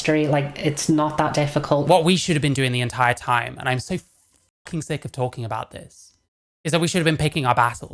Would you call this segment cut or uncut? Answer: cut